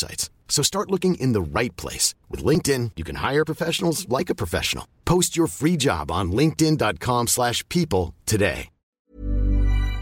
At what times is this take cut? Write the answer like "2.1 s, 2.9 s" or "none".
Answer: 8.8 s